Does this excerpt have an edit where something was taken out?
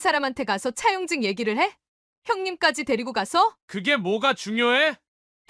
yes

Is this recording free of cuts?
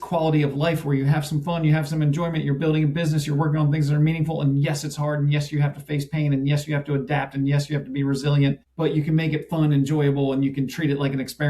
no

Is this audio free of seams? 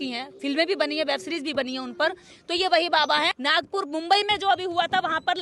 no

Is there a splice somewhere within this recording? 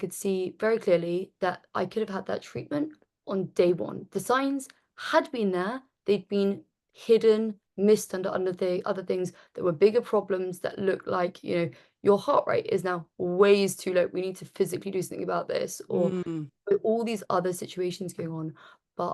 yes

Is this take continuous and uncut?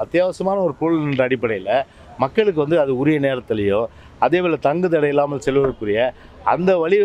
yes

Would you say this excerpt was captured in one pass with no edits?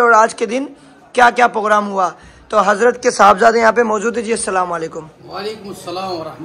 yes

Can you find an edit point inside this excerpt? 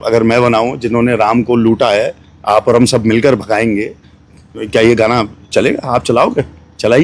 no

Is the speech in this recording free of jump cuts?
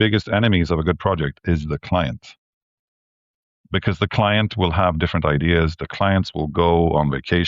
yes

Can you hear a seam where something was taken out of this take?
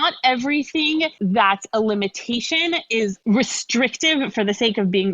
yes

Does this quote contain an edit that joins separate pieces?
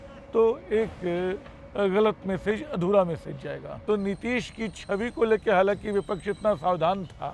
yes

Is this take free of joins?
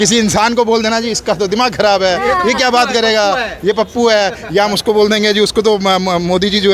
yes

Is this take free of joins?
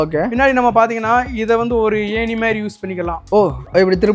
yes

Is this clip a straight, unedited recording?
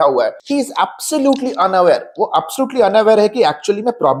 yes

